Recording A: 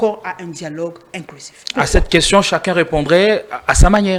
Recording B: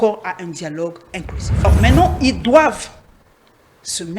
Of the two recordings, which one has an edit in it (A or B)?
B